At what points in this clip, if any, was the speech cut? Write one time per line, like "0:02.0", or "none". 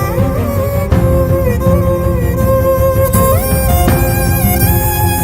none